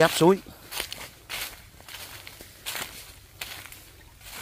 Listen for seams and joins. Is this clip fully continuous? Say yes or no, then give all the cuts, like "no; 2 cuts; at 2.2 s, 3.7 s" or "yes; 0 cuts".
yes; 0 cuts